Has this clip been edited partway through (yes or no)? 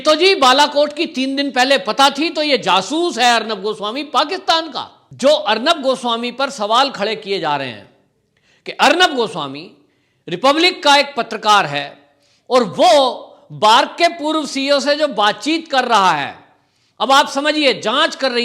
yes